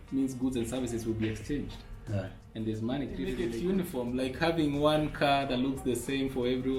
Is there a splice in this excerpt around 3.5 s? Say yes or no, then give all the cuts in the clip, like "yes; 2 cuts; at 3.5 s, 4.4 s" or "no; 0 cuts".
yes; 1 cut; at 3.5 s